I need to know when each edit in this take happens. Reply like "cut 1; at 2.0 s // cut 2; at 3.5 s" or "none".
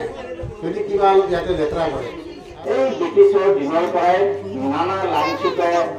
cut 1; at 2.5 s